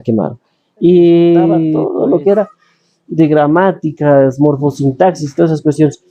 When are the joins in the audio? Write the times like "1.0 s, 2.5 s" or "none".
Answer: 1.8 s